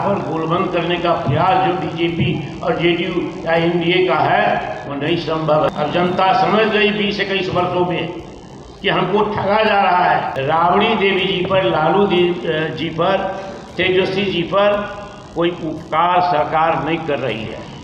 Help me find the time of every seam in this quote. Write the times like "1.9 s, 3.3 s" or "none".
5.7 s, 10.3 s